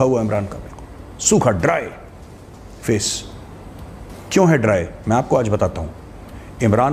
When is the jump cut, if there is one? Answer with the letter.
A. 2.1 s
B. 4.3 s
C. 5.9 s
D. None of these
D